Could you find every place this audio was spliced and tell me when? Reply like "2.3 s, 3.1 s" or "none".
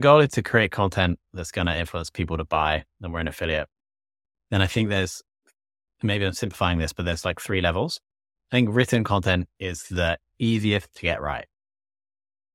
none